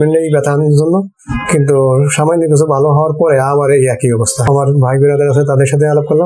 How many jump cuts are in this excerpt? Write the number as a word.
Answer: one